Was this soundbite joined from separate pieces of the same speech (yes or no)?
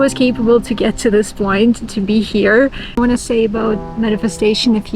yes